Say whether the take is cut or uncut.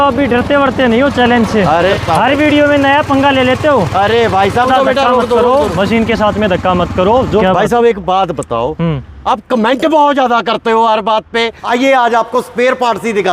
cut